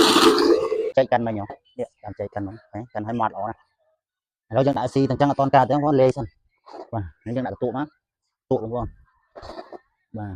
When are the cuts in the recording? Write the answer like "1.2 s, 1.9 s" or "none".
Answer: 0.9 s